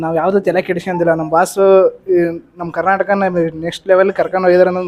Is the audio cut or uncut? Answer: uncut